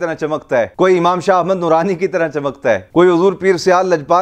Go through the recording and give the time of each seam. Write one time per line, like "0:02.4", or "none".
none